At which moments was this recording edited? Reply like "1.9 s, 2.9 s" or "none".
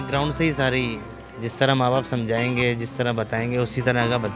none

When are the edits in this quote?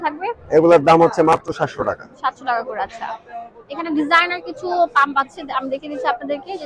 none

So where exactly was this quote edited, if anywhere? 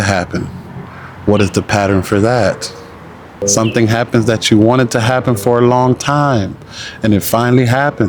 3.4 s

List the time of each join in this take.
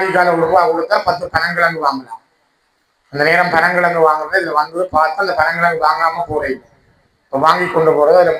none

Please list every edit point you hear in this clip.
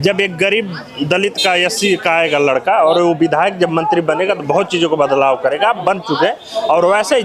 none

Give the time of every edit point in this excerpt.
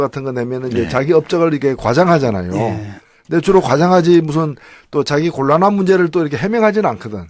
none

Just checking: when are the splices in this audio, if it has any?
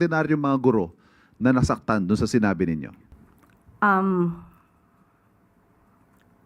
3.0 s

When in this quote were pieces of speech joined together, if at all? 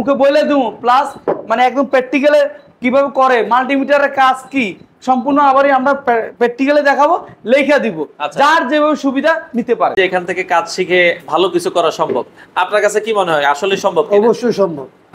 10.0 s

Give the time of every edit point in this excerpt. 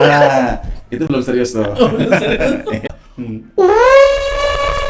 2.9 s

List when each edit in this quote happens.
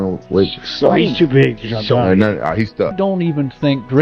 2.9 s

